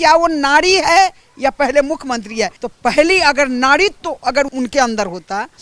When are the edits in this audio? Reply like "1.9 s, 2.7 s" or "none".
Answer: 2.6 s, 4.5 s